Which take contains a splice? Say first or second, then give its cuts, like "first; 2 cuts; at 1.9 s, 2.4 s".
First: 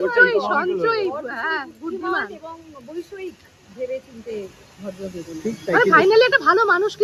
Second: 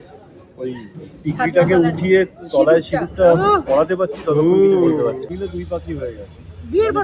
second; 1 cut; at 5.2 s